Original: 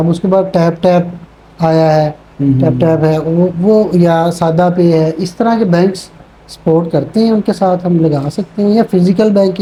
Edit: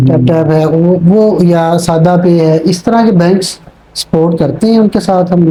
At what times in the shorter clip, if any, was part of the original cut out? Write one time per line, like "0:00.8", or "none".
none